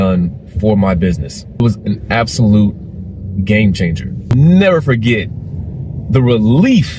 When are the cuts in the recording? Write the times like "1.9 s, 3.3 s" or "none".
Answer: 1.6 s, 4.4 s